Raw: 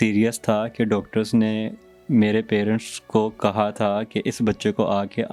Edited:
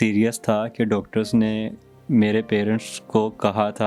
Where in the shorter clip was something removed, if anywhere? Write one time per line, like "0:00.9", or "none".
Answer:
none